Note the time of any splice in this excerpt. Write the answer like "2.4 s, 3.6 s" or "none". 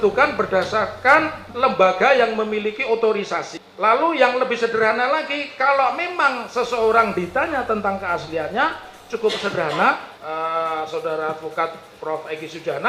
1.4 s, 3.6 s, 10.1 s